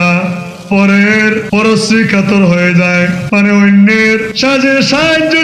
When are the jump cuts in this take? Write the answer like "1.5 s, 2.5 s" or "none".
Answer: 1.4 s, 3.2 s, 4.3 s